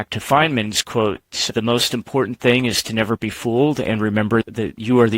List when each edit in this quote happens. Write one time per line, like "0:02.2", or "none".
0:01.5
0:04.4